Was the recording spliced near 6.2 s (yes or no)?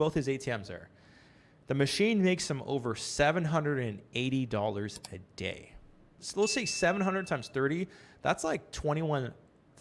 yes